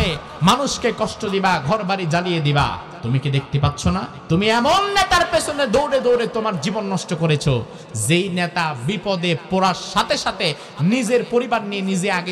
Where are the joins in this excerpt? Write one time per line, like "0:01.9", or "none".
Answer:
0:02.9
0:04.1